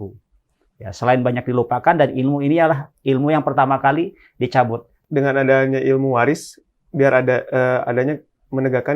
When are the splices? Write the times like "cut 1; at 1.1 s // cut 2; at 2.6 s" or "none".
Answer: cut 1; at 5.0 s